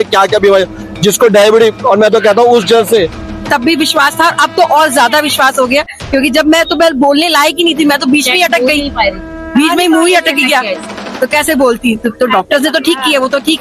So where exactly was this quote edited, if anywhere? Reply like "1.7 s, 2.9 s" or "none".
3.4 s

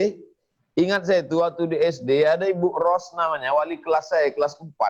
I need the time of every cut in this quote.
none

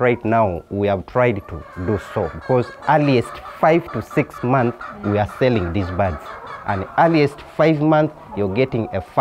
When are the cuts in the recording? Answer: none

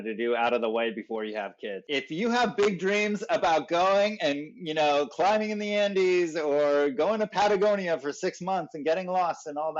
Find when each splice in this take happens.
1.8 s

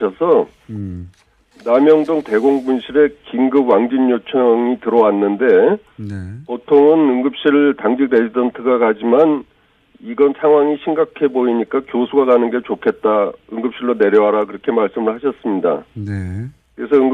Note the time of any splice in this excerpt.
none

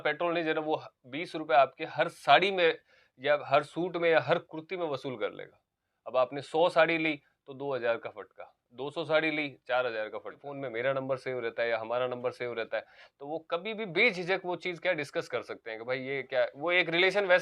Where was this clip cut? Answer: 10.5 s

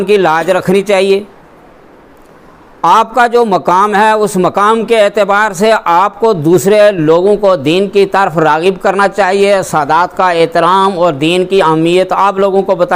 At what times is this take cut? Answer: none

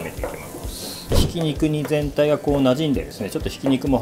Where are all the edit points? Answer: 1.2 s

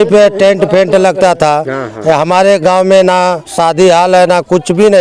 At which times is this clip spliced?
none

